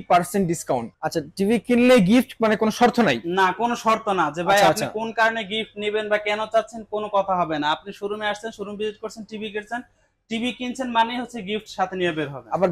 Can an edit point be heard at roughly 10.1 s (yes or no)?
no